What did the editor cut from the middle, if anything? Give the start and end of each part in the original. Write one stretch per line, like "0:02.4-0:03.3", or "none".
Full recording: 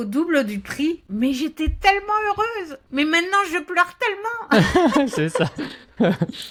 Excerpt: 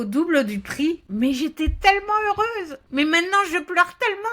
none